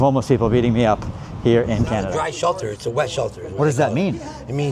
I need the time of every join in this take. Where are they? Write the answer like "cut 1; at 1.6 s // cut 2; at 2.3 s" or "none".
cut 1; at 2.1 s